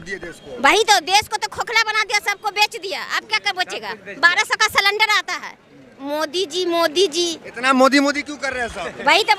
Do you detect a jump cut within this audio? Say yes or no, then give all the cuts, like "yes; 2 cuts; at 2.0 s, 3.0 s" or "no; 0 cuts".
no; 0 cuts